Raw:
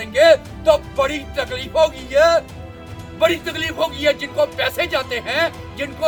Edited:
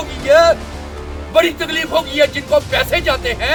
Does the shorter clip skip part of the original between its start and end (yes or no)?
no